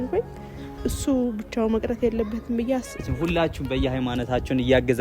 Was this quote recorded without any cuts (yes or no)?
no